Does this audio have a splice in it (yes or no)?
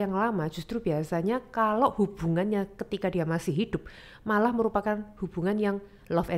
no